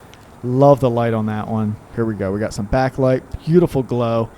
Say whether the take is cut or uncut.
cut